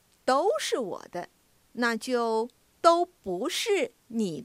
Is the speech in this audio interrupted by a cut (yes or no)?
no